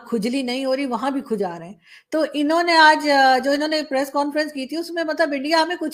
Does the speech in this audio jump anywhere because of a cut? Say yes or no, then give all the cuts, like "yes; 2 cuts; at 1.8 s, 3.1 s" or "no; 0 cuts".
no; 0 cuts